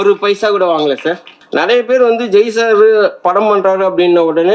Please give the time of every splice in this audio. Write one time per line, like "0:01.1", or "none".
0:01.3